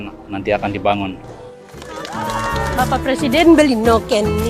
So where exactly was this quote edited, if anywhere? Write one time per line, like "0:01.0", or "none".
0:01.3